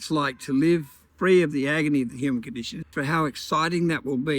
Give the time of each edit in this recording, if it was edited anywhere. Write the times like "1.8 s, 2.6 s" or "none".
1.0 s, 2.9 s